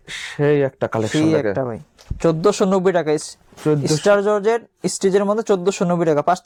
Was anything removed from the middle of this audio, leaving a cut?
no; 0 cuts

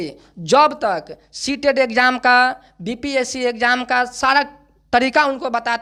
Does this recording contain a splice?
no; 0 cuts

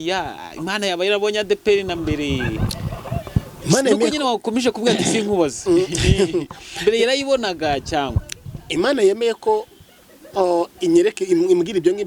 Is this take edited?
no; 0 cuts

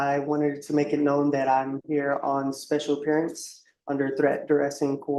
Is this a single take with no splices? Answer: yes; 0 cuts

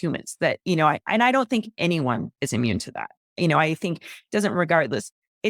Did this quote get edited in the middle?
no; 0 cuts

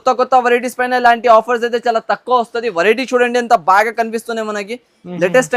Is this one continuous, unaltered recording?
yes; 0 cuts

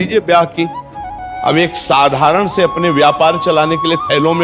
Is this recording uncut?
no; 1 cut; at 1.2 s

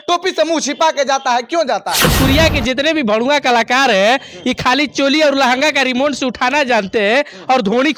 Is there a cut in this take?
yes; 1 cut; at 2.1 s

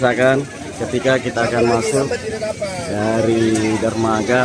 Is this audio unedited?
yes; 0 cuts

